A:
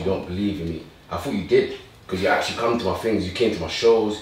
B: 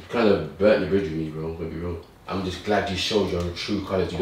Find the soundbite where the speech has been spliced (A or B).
B